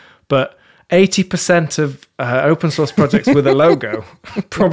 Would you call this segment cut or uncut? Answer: uncut